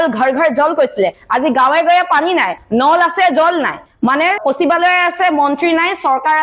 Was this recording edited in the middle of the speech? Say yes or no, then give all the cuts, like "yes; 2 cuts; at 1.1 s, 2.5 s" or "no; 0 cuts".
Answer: no; 0 cuts